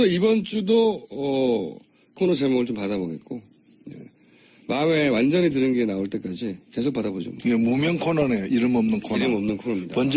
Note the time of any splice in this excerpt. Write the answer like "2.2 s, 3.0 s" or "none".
none